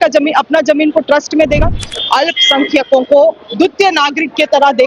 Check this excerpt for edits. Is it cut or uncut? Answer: cut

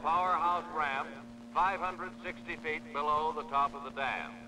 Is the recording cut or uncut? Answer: cut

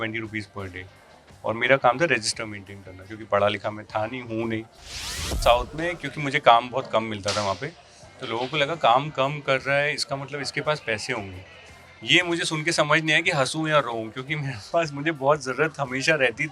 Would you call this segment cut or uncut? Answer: cut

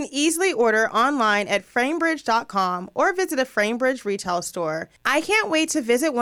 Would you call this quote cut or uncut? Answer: cut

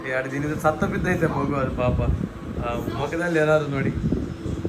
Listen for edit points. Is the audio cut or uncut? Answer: uncut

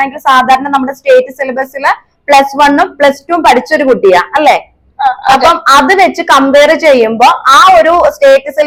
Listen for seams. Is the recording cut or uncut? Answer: uncut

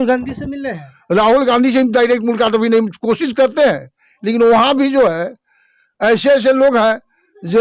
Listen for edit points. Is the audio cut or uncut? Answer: uncut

